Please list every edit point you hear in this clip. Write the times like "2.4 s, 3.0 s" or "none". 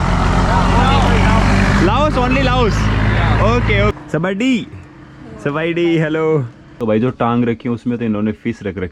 3.9 s, 6.6 s

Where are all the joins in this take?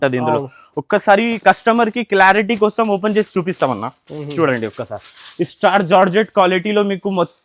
none

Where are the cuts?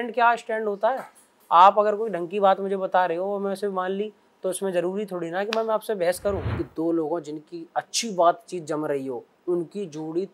6.5 s

